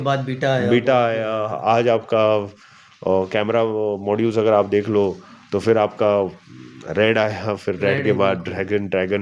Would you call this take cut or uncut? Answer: uncut